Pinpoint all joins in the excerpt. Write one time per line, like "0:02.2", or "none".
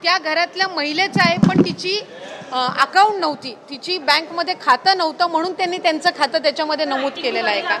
none